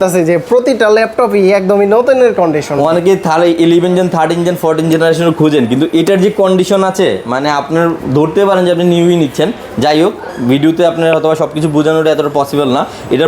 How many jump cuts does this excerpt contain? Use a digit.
0